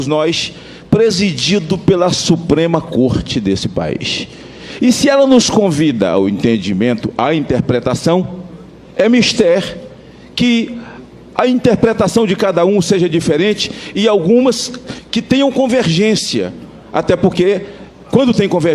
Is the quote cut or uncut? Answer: cut